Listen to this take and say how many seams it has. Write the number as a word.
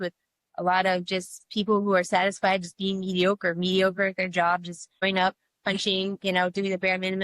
one